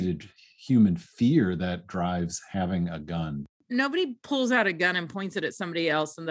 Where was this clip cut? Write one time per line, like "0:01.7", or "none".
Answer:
0:03.6

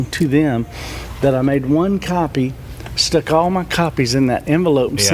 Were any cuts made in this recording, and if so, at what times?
none

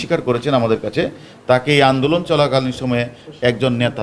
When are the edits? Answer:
none

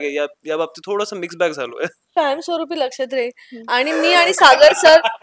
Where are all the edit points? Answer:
0:02.1

